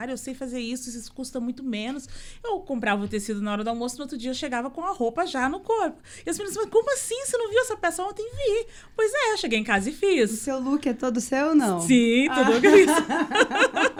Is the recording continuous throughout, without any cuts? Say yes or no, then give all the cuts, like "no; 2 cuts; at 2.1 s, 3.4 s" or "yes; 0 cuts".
yes; 0 cuts